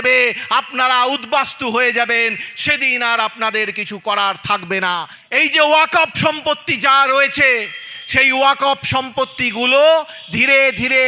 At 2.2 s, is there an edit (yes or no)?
no